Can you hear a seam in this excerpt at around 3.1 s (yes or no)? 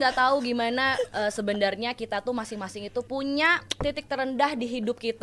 yes